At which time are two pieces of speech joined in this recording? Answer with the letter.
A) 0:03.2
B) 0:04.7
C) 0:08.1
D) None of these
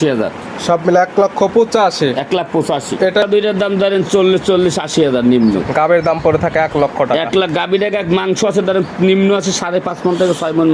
A